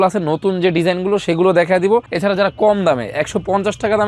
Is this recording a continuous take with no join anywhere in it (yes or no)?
no